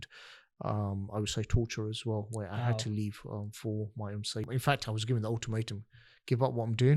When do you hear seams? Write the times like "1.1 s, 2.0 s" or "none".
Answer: 4.5 s